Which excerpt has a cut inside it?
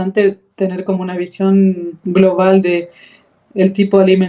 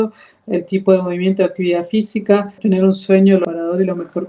second; 2 cuts; at 2.5 s, 3.4 s

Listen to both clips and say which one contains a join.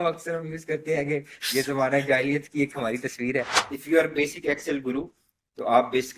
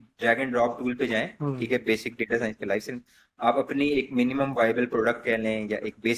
first; 1 cut; at 3.6 s

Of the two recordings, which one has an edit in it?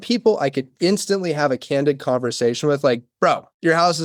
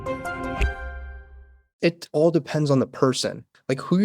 second; 1 cut; at 1.6 s

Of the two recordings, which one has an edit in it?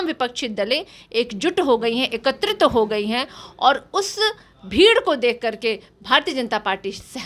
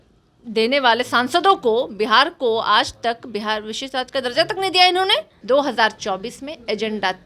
second; 1 cut; at 5.3 s

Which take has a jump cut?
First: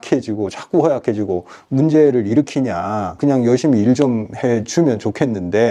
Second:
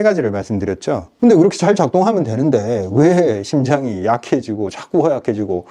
second; 1 cut; at 1.1 s

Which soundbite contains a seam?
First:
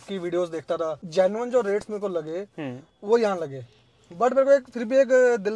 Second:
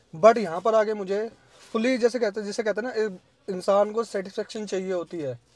first; 1 cut; at 1.0 s

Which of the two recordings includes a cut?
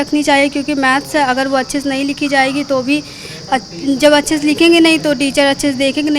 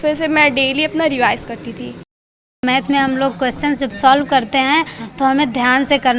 second; 1 cut; at 2.5 s

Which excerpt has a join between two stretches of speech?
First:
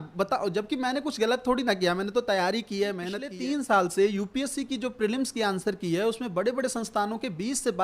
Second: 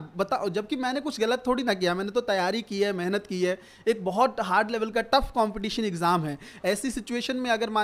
first; 1 cut; at 3.2 s

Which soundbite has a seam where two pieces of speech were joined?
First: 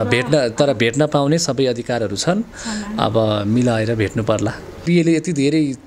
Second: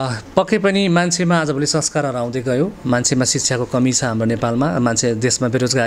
first; 1 cut; at 4.8 s

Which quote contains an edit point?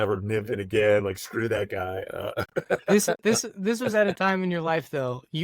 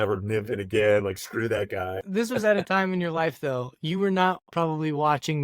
second; 1 cut; at 2.0 s

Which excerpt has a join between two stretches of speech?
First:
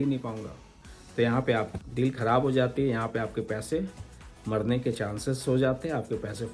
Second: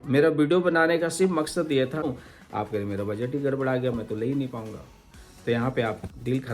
second; 1 cut; at 2.0 s

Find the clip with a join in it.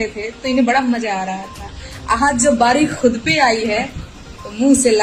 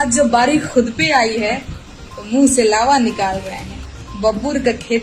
second; 1 cut; at 3.8 s

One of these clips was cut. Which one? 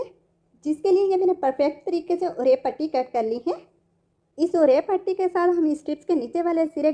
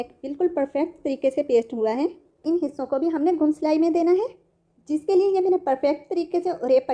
second; 1 cut; at 2.4 s

